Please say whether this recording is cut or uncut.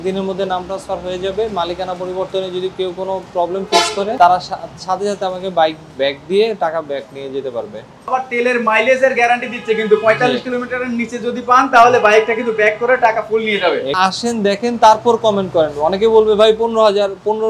cut